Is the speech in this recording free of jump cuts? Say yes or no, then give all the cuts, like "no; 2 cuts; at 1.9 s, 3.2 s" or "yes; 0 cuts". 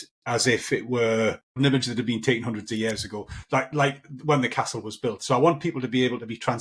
no; 1 cut; at 1.6 s